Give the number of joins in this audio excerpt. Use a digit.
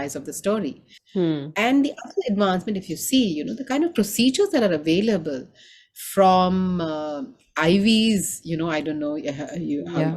0